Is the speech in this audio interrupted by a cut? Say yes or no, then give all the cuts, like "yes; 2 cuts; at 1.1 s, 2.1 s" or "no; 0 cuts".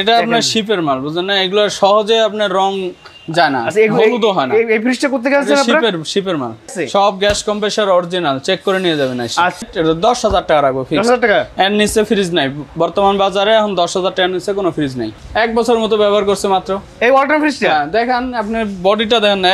yes; 3 cuts; at 6.7 s, 9.6 s, 15.2 s